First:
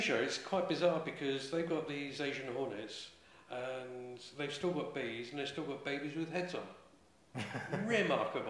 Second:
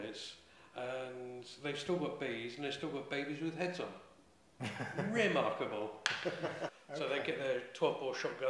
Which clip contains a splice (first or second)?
second